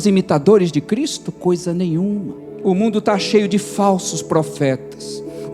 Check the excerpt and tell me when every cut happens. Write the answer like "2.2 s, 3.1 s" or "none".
2.4 s